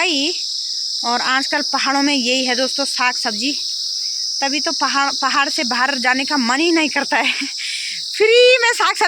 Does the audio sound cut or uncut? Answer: uncut